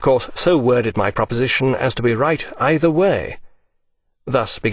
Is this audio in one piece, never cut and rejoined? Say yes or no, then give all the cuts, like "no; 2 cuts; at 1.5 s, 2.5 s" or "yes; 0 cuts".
no; 1 cut; at 3.5 s